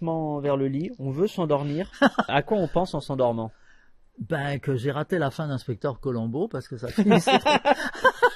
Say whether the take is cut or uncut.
cut